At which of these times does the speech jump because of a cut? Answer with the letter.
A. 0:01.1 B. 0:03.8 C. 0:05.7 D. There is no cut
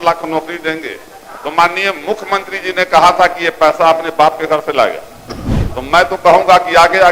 C